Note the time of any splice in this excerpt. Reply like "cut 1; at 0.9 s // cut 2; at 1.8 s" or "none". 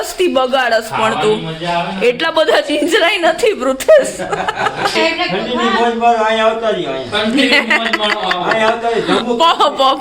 cut 1; at 4.9 s